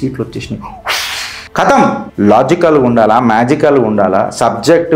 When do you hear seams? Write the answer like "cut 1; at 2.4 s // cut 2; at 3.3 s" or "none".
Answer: cut 1; at 1.4 s // cut 2; at 2.0 s